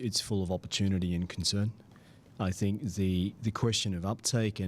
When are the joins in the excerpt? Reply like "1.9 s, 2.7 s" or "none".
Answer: none